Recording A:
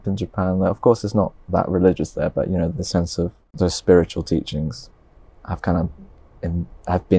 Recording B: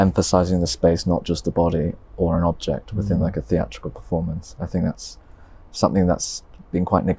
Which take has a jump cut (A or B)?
A